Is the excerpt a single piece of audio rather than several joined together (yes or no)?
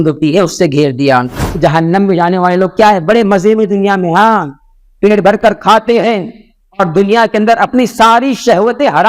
no